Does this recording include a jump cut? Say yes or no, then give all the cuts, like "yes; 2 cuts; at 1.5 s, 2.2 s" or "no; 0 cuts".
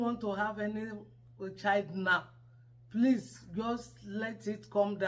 no; 0 cuts